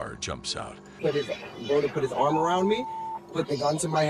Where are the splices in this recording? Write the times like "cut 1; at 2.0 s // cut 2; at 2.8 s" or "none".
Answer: cut 1; at 1.0 s